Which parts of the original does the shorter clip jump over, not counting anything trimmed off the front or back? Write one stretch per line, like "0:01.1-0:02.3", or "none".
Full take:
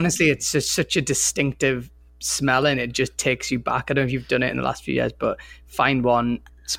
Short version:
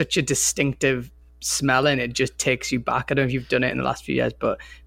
none